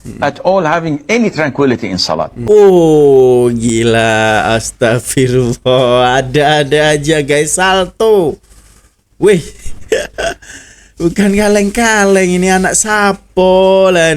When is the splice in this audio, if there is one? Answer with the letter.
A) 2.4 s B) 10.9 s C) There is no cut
A